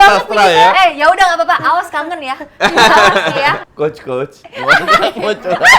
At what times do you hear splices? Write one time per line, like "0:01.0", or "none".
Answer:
0:03.7